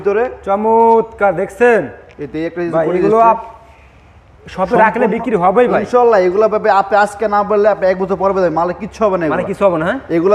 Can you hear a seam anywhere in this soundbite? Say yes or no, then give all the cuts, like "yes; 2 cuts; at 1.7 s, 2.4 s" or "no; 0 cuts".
no; 0 cuts